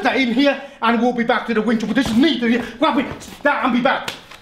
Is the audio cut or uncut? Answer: uncut